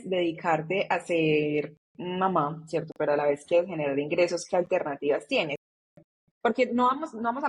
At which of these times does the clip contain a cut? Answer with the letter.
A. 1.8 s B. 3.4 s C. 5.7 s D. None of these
C